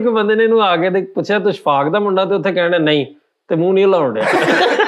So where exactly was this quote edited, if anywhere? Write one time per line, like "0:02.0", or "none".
none